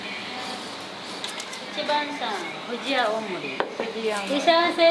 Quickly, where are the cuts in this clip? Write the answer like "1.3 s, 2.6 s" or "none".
1.2 s

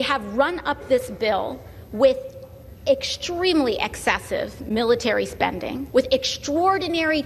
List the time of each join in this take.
5.8 s

